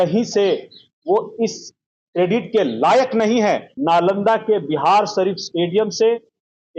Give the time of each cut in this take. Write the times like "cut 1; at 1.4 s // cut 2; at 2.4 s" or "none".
cut 1; at 3.7 s